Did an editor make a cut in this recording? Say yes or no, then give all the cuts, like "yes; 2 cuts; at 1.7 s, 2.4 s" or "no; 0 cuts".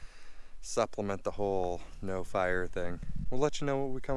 yes; 1 cut; at 3.1 s